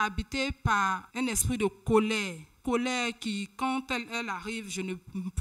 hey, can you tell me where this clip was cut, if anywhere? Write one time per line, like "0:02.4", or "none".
0:01.1
0:02.6